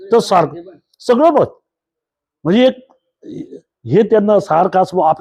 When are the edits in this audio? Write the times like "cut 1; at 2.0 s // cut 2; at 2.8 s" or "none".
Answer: none